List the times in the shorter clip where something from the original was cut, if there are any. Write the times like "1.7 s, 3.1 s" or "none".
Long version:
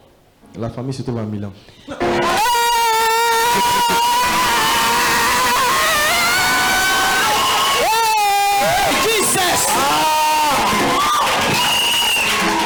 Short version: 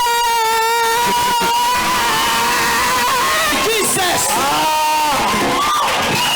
3.5 s